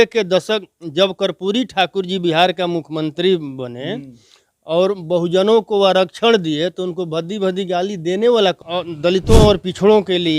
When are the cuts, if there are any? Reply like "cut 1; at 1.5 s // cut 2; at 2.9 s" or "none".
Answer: cut 1; at 8.7 s